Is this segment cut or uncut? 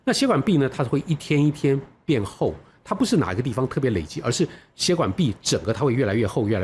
uncut